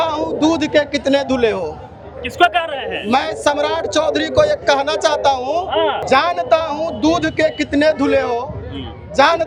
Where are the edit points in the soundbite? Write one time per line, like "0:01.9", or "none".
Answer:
none